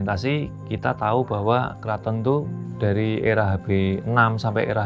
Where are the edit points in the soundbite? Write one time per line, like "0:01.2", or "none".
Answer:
0:01.7
0:02.6